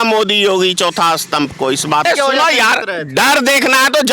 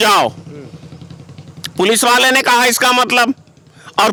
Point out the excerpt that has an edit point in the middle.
first; 1 cut; at 2.0 s

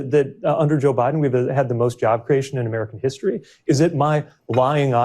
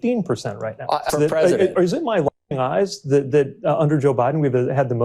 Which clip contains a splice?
second; 1 cut; at 1.1 s

